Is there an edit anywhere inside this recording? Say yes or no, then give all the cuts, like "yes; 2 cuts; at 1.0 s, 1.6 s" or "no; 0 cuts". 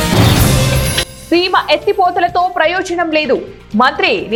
no; 0 cuts